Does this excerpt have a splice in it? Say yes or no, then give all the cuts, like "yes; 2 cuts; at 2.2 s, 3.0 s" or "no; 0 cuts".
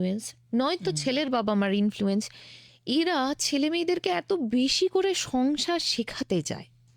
no; 0 cuts